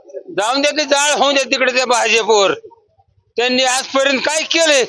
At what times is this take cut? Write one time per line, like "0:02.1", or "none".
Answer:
none